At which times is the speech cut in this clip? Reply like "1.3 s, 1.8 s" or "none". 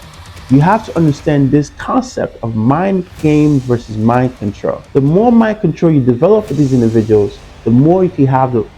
none

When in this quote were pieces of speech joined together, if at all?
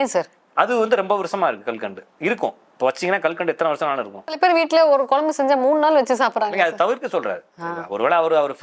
4.4 s

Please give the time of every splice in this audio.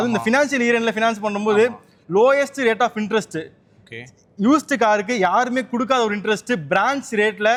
none

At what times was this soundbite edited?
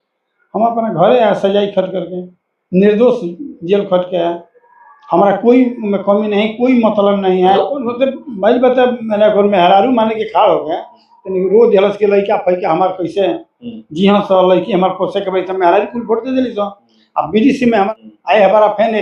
7.6 s, 17.9 s

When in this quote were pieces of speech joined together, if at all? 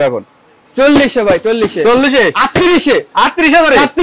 none

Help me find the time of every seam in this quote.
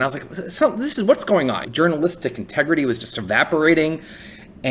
1.6 s, 3.1 s

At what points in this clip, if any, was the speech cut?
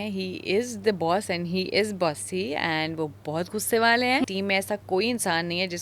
4.2 s

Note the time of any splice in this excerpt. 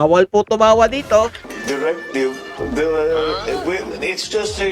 1.5 s

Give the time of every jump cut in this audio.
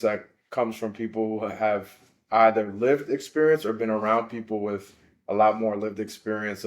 none

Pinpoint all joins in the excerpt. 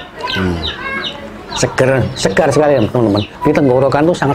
3.3 s

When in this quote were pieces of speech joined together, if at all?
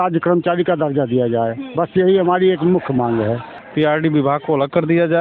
3.5 s

